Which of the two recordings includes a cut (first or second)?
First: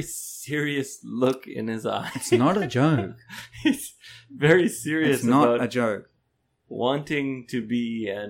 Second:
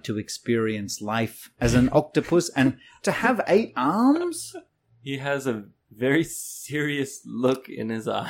second